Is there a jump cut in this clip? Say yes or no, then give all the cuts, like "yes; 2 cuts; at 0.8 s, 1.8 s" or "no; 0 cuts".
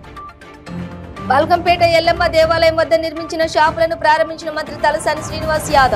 yes; 1 cut; at 1.0 s